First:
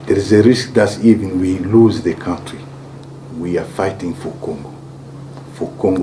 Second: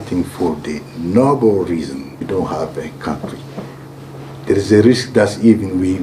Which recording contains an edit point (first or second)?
second